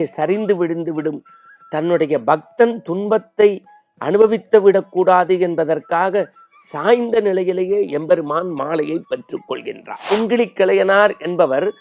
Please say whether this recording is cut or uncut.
cut